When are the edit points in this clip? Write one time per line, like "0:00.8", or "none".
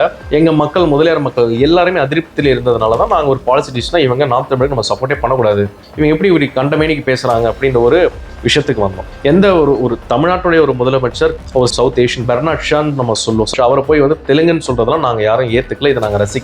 0:11.4